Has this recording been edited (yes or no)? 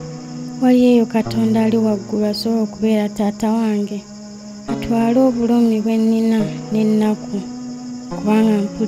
no